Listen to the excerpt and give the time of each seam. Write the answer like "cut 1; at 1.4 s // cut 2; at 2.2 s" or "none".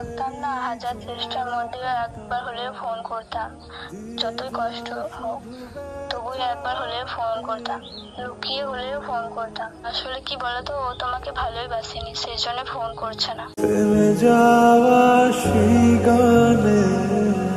none